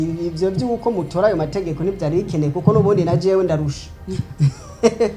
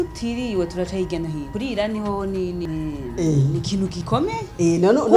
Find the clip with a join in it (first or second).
second